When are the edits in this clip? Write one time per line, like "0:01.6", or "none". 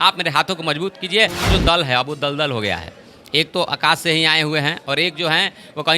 0:01.5